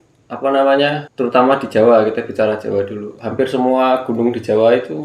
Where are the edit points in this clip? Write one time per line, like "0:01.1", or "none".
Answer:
0:01.1